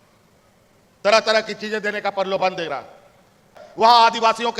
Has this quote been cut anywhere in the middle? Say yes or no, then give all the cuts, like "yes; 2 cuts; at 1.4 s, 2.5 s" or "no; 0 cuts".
yes; 1 cut; at 3.6 s